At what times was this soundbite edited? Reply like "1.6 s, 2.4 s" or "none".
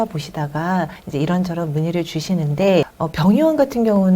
1.0 s, 3.0 s

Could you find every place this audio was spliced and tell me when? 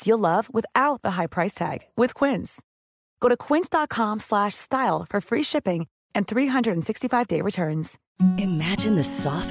none

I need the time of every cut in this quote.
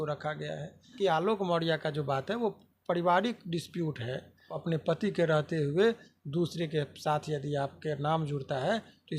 0.9 s, 4.6 s

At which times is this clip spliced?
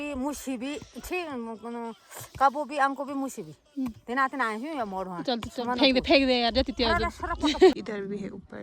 7.7 s

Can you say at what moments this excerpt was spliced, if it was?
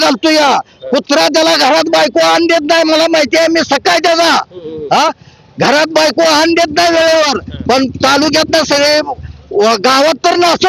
none

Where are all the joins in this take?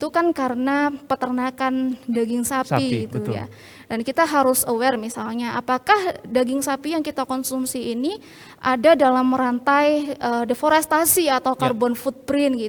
none

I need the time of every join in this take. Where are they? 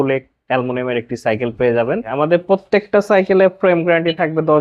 2.1 s

